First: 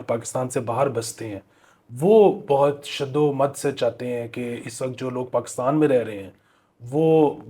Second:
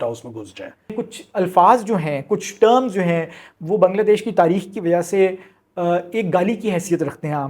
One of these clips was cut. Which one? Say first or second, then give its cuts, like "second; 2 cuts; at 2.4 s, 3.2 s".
second; 1 cut; at 0.9 s